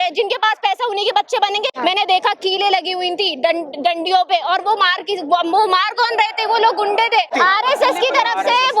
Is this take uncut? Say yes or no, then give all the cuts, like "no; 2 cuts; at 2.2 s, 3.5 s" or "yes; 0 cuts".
no; 2 cuts; at 1.7 s, 7.3 s